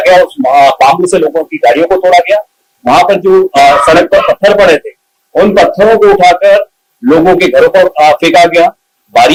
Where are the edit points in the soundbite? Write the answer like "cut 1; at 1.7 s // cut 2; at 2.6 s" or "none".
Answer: none